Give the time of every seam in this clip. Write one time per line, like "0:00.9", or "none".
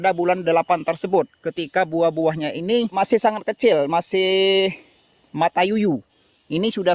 0:02.9